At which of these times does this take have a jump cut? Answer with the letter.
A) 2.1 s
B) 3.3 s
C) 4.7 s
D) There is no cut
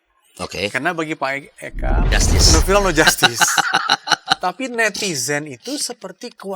A